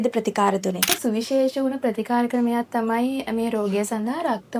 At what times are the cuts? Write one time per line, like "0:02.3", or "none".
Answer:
0:00.9

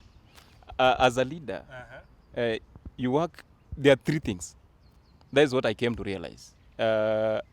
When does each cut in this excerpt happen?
none

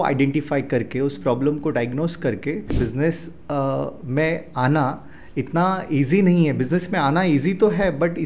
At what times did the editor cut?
0:02.8

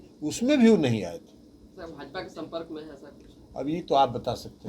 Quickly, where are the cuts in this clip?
none

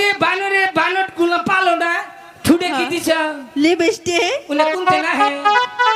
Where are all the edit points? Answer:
none

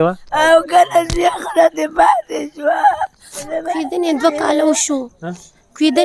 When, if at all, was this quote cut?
0:03.4

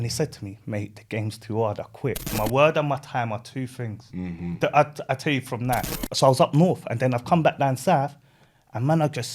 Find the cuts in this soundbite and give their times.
0:02.3
0:06.0

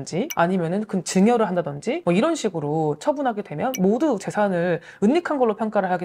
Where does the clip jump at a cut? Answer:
0:02.0

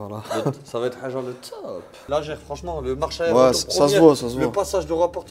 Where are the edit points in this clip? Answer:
0:02.0

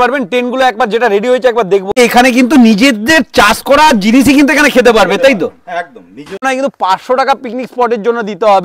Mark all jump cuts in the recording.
0:01.9
0:06.4

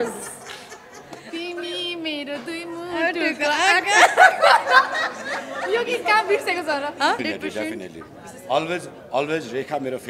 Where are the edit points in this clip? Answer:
0:07.2

